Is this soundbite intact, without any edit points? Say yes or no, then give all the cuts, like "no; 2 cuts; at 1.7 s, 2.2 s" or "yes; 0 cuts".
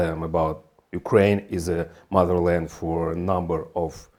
yes; 0 cuts